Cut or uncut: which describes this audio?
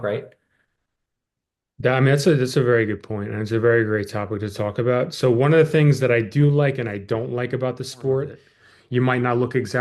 cut